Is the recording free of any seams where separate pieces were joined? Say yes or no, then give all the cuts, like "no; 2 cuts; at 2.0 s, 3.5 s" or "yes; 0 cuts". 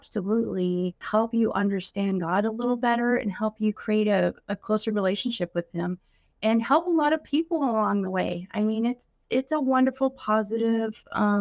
no; 2 cuts; at 1.0 s, 9.2 s